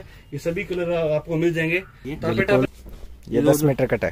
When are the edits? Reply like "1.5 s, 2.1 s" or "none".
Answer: 2.7 s